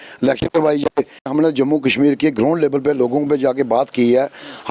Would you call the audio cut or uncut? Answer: cut